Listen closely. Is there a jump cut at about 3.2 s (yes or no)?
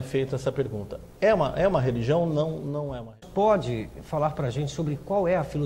yes